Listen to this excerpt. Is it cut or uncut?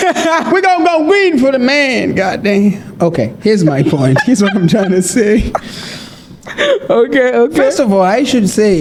uncut